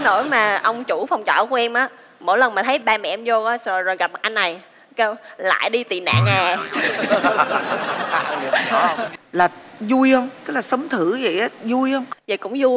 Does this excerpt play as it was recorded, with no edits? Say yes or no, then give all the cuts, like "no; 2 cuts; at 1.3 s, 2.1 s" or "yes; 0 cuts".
no; 1 cut; at 9.2 s